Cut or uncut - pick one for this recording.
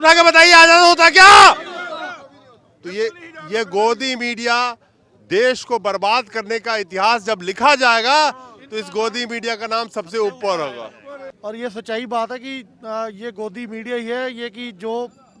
cut